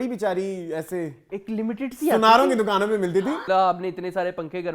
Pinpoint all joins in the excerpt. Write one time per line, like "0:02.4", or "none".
0:03.4